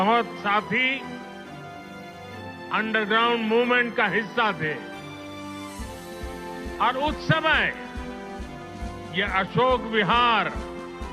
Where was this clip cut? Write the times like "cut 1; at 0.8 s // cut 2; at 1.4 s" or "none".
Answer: cut 1; at 1.3 s // cut 2; at 2.7 s // cut 3; at 7.7 s // cut 4; at 9.1 s